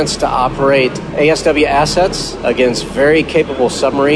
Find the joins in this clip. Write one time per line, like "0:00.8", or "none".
0:01.0
0:02.3